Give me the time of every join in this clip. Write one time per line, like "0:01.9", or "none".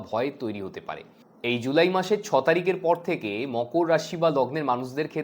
0:01.2